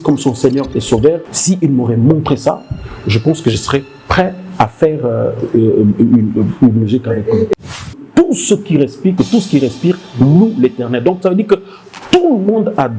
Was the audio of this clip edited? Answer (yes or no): yes